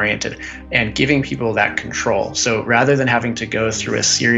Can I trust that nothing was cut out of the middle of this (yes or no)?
yes